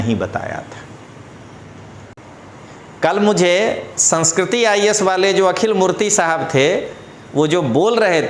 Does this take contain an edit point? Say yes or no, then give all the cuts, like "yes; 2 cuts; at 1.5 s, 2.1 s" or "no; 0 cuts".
yes; 1 cut; at 2.1 s